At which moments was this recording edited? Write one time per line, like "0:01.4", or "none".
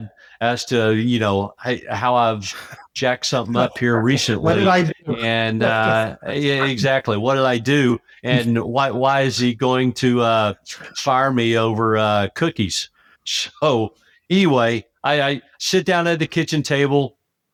none